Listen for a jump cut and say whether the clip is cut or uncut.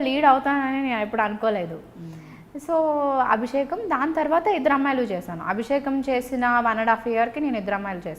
uncut